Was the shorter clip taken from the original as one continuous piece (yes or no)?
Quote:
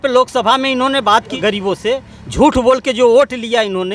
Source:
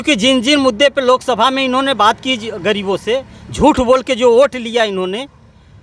no